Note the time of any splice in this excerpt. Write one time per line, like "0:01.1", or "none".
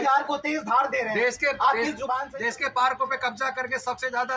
0:02.3